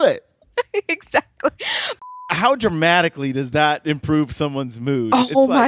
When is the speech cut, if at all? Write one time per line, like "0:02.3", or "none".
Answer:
0:01.9

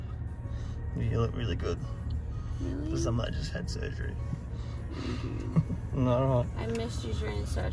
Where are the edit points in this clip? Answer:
none

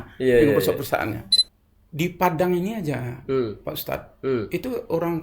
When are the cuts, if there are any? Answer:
0:01.2

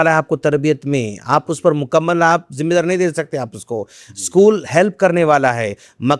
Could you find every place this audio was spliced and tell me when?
none

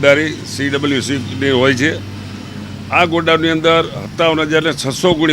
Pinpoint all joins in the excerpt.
none

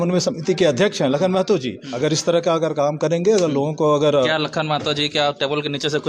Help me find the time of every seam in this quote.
0:01.8

